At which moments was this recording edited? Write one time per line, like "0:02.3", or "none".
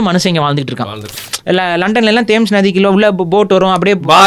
0:01.2